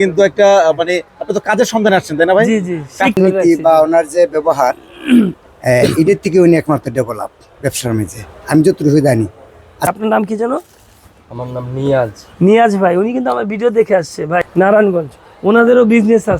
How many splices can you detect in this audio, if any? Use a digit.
3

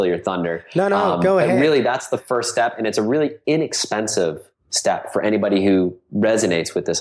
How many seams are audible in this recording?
0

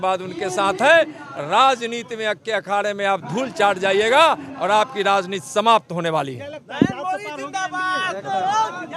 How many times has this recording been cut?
0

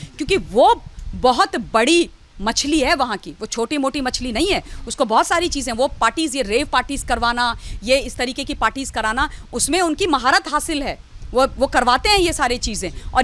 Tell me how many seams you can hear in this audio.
0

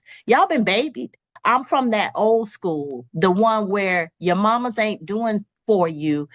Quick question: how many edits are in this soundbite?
1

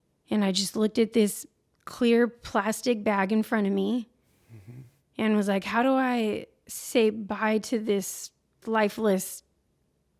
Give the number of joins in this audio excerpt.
1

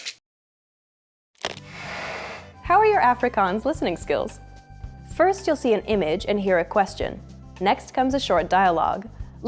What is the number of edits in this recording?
2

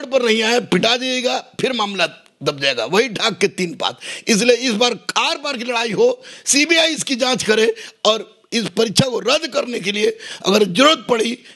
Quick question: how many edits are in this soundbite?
0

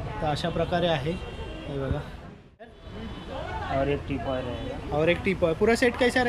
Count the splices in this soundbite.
1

